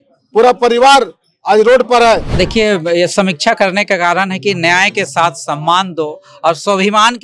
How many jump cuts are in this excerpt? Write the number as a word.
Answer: one